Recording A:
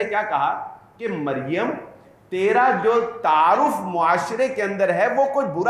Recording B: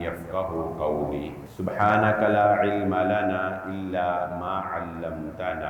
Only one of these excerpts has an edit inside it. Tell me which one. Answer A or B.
B